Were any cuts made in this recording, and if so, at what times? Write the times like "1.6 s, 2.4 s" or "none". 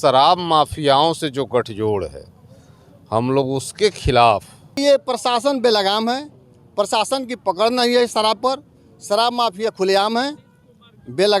4.7 s